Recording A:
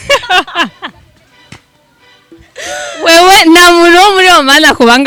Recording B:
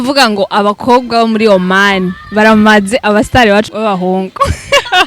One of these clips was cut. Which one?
B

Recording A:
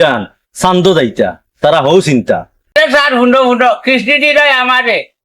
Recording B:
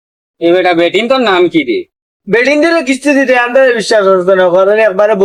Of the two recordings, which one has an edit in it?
A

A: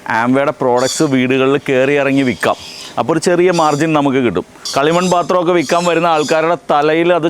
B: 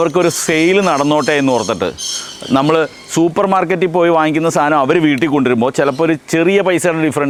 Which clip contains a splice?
A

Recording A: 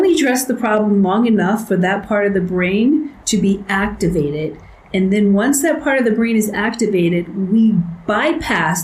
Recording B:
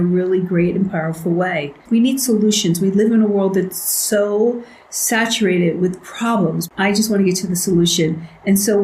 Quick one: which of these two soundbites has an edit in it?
B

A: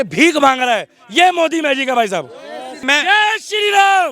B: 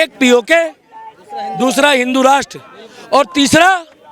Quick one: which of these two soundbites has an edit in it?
A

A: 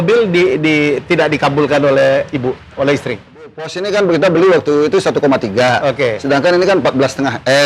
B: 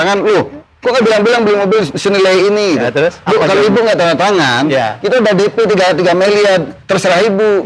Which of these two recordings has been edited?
A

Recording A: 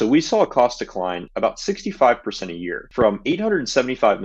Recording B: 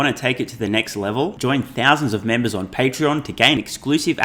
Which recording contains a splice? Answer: A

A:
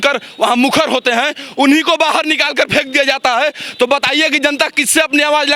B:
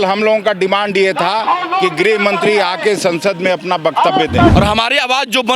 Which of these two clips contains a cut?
B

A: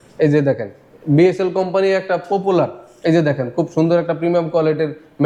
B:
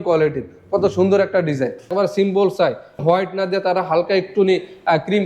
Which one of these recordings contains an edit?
B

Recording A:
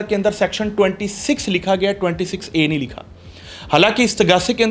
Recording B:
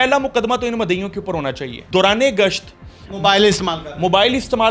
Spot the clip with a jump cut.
B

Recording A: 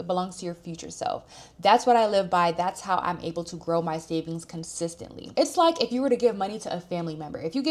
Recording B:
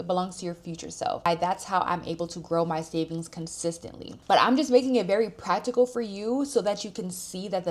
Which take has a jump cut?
B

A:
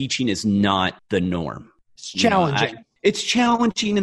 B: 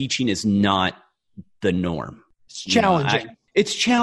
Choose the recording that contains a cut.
A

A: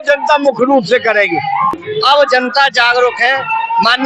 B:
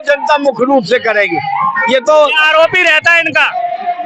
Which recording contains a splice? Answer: A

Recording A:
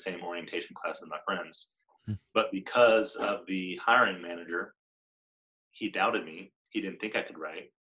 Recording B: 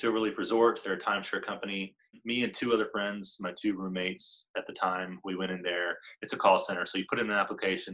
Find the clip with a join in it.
B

